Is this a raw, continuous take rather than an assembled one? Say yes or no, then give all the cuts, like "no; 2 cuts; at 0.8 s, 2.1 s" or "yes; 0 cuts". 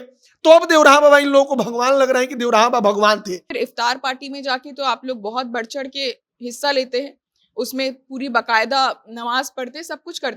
no; 1 cut; at 3.5 s